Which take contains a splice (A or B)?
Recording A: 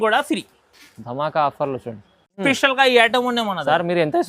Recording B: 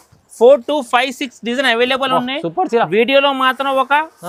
A